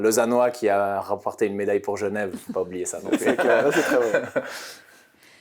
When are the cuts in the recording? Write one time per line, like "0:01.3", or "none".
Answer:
none